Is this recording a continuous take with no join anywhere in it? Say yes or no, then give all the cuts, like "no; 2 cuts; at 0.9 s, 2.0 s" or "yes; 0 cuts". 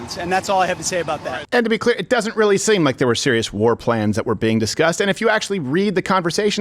no; 1 cut; at 1.3 s